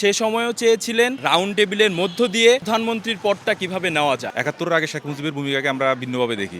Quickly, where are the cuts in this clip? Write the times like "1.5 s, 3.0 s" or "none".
1.2 s, 2.6 s, 4.3 s